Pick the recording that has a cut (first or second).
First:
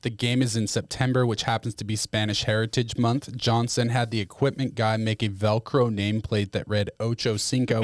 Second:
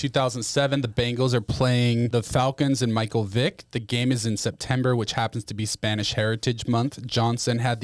second